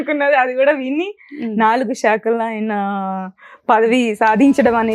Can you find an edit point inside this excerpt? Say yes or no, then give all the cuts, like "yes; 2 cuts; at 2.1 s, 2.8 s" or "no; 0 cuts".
no; 0 cuts